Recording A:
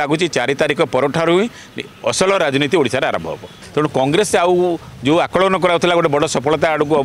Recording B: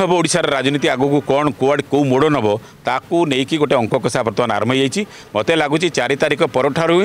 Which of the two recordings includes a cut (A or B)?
A